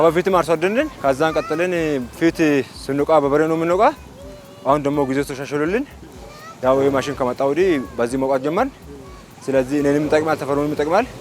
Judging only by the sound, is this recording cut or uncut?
cut